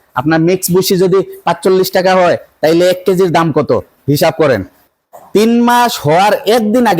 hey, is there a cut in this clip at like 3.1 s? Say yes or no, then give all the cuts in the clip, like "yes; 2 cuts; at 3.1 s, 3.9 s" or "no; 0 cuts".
no; 1 cut; at 4.7 s